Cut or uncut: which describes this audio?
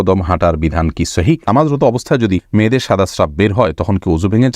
cut